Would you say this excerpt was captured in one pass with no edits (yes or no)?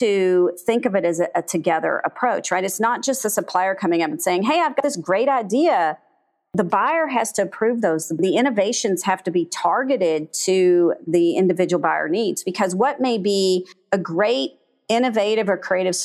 yes